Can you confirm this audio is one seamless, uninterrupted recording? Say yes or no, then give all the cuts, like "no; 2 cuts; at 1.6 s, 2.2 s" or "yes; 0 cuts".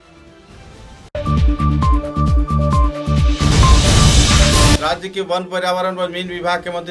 no; 1 cut; at 4.8 s